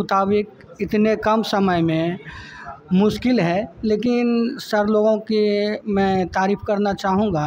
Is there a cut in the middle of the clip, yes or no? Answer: no